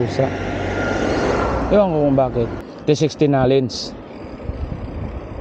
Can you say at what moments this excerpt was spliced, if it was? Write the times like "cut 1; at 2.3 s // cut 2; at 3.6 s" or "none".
cut 1; at 2.7 s